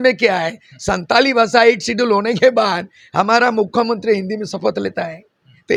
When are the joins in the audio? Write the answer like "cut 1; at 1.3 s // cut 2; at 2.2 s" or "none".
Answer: none